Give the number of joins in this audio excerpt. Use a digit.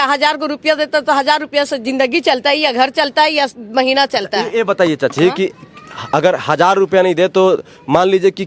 0